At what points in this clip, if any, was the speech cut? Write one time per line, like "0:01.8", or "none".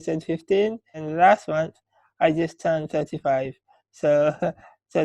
0:01.0